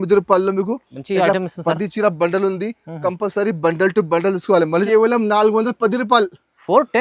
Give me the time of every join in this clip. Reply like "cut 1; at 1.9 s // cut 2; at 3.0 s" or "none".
cut 1; at 4.8 s